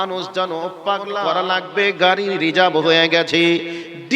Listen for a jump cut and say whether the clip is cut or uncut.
cut